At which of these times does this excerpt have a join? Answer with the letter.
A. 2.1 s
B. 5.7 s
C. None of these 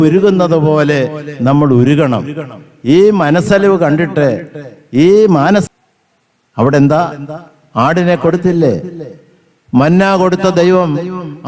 B